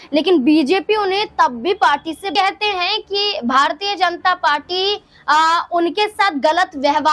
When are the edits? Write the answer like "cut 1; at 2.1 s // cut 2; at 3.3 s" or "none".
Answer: cut 1; at 2.3 s